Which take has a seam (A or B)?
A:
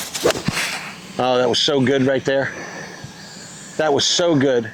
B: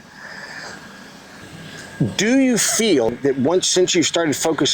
B